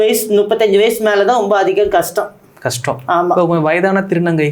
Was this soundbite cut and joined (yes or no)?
no